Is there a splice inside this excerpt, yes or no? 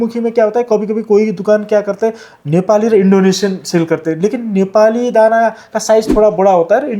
no